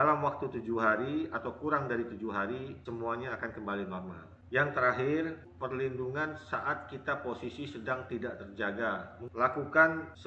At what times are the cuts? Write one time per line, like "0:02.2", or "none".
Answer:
none